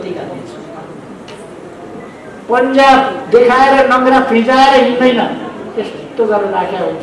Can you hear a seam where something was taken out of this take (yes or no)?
yes